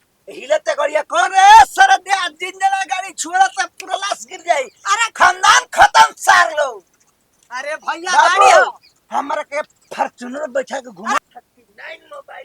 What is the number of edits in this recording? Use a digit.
1